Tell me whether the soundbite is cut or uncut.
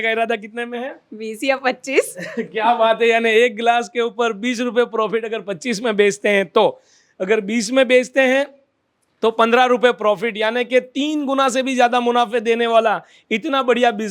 uncut